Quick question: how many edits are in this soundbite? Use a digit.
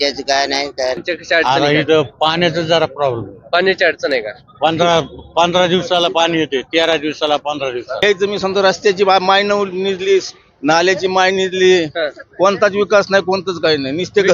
2